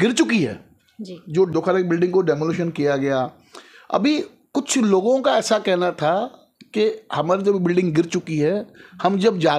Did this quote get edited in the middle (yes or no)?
yes